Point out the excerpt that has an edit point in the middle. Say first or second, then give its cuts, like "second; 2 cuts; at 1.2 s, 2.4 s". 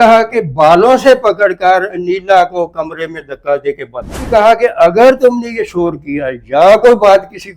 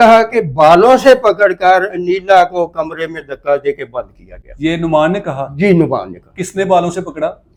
first; 1 cut; at 4.3 s